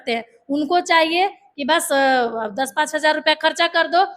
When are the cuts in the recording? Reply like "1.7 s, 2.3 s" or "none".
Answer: none